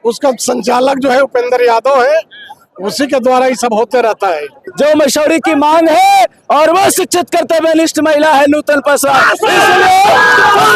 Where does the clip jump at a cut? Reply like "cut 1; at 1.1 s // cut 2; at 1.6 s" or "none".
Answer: cut 1; at 4.6 s